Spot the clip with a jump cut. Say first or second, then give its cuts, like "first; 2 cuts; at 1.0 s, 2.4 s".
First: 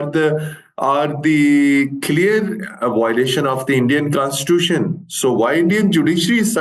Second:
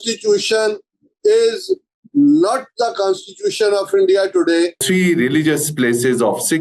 second; 1 cut; at 4.8 s